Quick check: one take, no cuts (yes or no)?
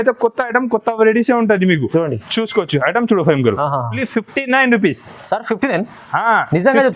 no